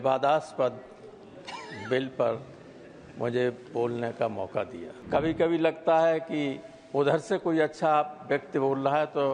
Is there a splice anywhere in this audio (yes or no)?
yes